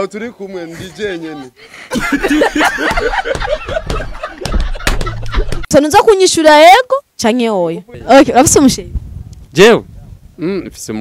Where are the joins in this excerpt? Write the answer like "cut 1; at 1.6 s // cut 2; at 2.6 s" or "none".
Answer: cut 1; at 5.6 s